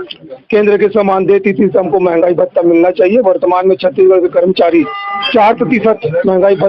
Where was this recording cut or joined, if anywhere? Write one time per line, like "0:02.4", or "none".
none